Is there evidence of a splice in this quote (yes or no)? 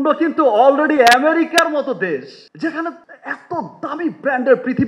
no